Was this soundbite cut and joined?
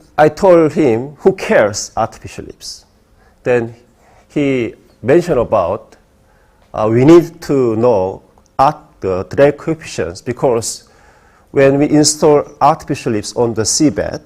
yes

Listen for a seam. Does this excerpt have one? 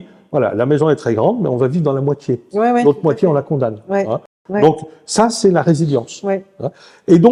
no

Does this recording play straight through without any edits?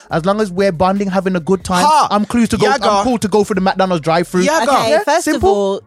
yes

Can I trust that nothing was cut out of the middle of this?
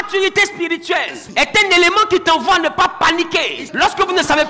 no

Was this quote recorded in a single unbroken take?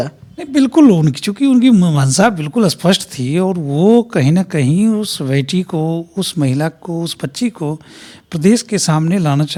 yes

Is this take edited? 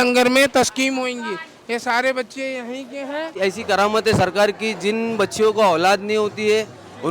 yes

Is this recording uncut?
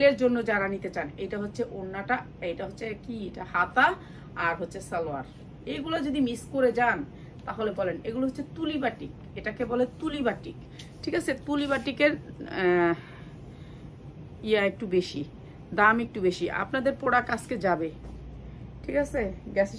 yes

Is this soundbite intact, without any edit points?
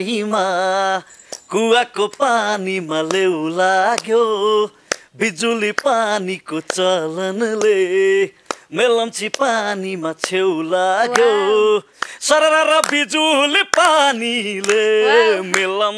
yes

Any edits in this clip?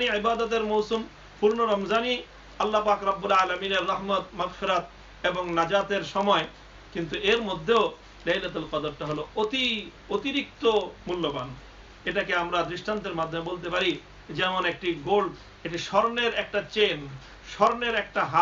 no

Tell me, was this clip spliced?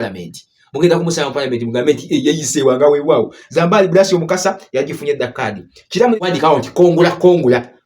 yes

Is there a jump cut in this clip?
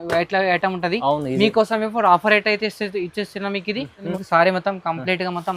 yes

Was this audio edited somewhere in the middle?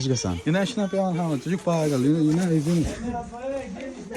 no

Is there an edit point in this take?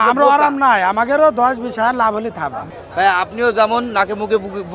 yes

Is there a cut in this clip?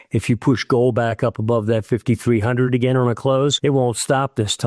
yes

